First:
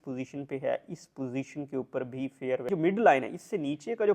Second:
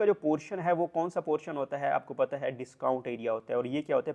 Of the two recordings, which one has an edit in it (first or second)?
first